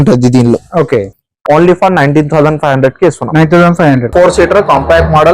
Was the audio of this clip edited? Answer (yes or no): yes